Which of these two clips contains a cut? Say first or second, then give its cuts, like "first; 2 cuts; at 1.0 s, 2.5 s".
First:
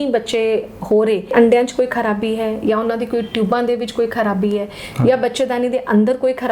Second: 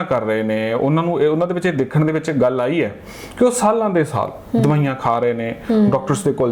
first; 1 cut; at 1.3 s